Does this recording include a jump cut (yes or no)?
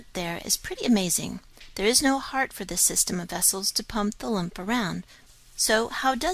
no